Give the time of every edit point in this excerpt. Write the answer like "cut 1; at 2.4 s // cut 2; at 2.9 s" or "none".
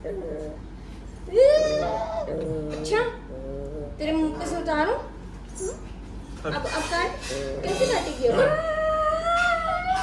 none